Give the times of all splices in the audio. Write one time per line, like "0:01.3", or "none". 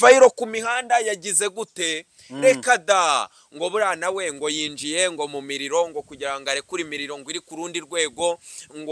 none